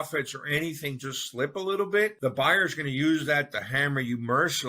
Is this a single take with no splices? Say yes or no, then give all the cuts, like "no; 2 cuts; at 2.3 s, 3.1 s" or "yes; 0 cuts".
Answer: no; 1 cut; at 2.1 s